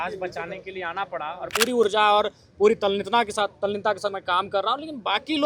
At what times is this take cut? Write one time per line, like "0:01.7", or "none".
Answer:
0:01.5